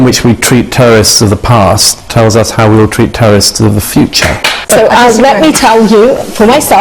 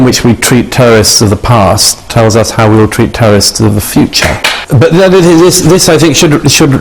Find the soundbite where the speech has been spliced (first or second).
first